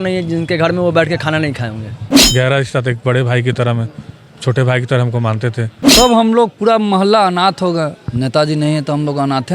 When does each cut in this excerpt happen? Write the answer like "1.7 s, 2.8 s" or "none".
2.1 s, 5.7 s